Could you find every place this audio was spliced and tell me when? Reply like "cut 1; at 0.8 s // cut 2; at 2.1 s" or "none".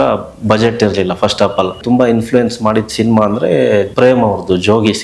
cut 1; at 1.8 s // cut 2; at 3.9 s